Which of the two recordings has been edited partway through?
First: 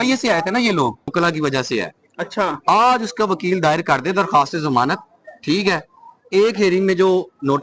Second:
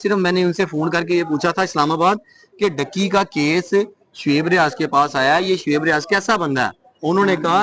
first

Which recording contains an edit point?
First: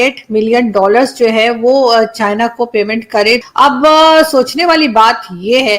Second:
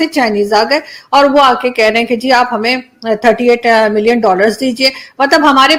first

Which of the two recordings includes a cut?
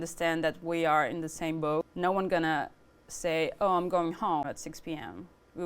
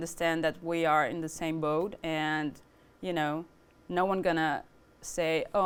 first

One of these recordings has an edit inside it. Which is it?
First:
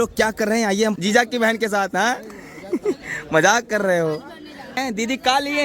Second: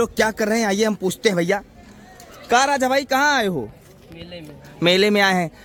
first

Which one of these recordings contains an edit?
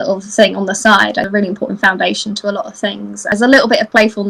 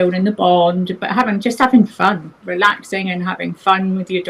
first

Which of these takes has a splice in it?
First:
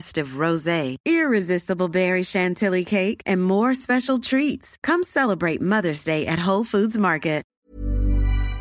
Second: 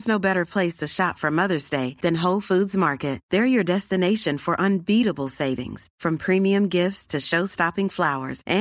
first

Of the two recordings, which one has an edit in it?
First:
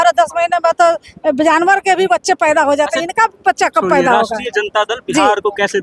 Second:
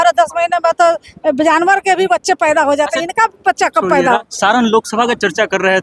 second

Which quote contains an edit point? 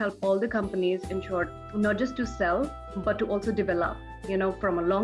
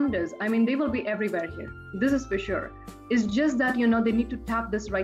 first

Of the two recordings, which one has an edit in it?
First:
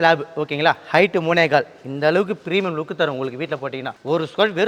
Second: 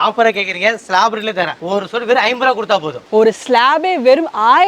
second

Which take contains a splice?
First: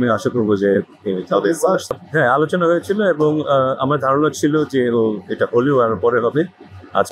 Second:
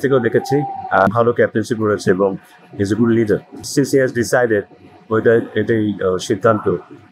second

